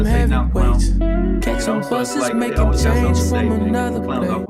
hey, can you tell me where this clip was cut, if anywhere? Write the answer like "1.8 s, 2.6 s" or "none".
none